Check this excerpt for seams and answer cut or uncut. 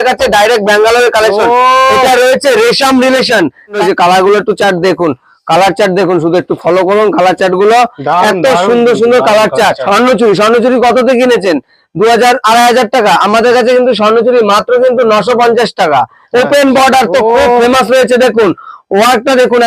cut